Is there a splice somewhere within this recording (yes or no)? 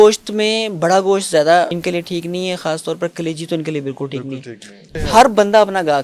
yes